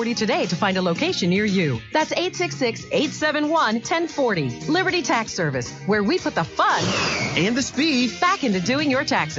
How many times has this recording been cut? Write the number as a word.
zero